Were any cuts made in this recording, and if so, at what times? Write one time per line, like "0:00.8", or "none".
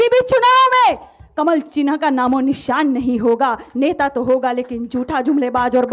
none